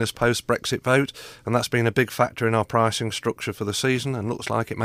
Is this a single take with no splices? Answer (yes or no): yes